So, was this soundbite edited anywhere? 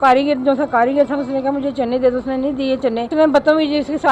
yes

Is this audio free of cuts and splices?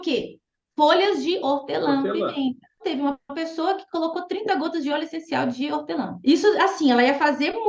yes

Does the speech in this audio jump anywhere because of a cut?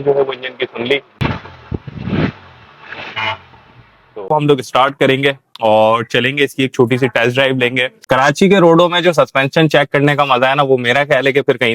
yes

